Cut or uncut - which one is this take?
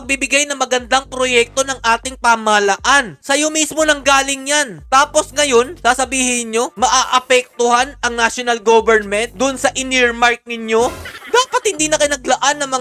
uncut